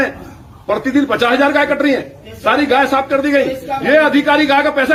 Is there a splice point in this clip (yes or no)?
no